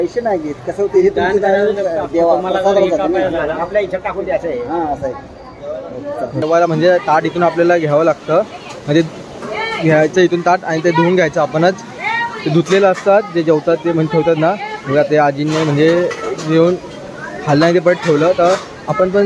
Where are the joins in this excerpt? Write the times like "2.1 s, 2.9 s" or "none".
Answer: 6.4 s